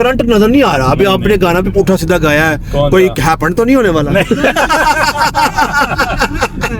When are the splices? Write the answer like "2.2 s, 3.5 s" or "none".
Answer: none